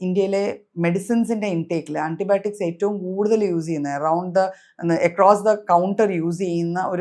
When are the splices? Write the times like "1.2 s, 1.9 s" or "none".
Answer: none

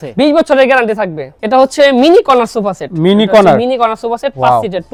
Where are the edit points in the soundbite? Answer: none

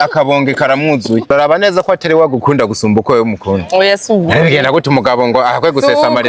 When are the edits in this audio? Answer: 1.3 s

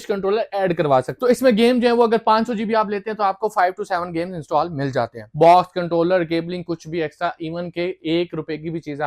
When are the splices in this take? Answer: 1.1 s, 5.2 s

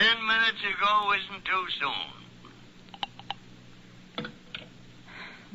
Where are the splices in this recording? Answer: 2.5 s

